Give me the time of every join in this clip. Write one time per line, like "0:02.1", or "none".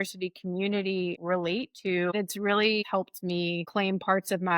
0:01.2
0:02.1
0:03.2